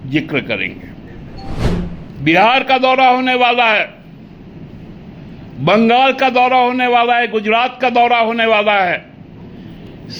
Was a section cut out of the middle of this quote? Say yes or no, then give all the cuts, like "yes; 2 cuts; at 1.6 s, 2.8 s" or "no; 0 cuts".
yes; 1 cut; at 1.7 s